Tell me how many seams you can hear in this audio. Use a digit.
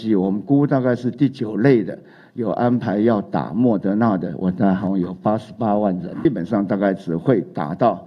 1